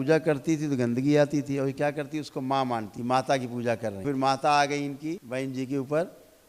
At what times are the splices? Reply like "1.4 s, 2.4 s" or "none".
2.9 s, 4.0 s, 5.2 s